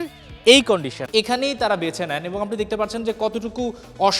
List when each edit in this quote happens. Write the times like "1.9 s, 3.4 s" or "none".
0.9 s